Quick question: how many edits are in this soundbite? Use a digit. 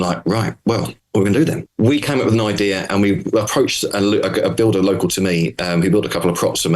2